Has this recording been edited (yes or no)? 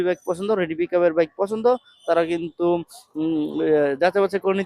no